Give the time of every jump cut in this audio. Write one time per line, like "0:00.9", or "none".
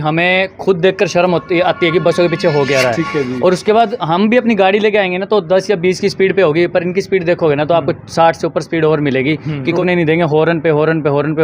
0:09.8